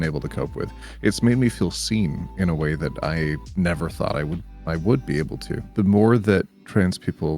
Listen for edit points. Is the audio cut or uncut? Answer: cut